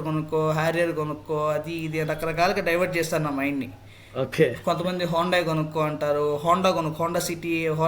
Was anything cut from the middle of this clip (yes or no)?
no